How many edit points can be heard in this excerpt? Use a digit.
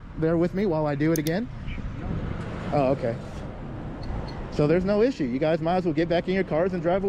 0